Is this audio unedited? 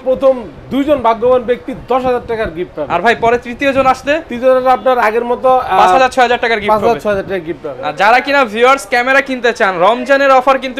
yes; 0 cuts

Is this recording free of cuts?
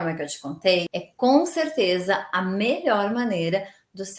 no; 1 cut; at 0.9 s

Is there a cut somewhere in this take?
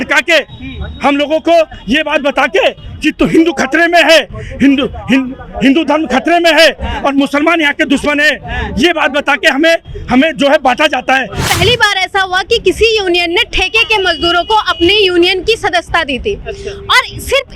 yes; 1 cut; at 11.4 s

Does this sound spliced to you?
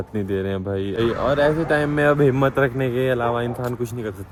no; 0 cuts

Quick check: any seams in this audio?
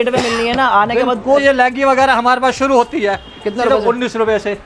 yes; 1 cut; at 1.4 s

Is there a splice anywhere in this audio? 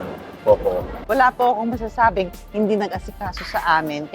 yes; 1 cut; at 0.9 s

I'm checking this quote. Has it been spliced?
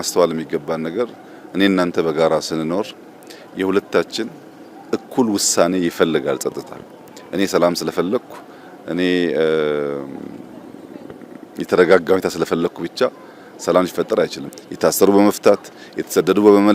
yes; 1 cut; at 14.4 s

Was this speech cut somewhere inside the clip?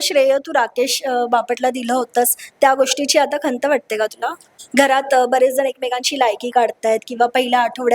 yes; 1 cut; at 4.5 s

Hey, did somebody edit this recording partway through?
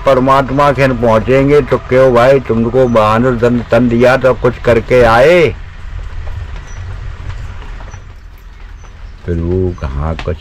no; 0 cuts

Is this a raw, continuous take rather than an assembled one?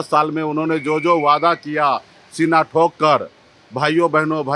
yes; 0 cuts

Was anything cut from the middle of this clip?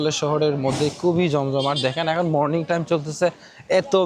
no; 0 cuts

